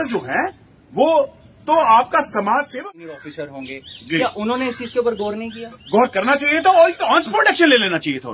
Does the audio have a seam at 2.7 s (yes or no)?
yes